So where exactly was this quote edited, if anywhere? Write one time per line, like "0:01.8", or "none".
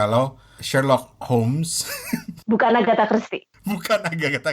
none